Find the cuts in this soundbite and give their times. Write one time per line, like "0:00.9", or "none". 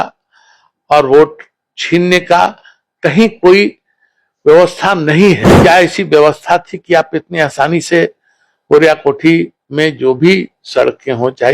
0:05.5